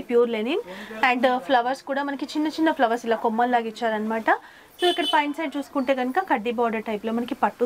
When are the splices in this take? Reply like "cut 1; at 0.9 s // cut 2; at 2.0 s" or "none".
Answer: none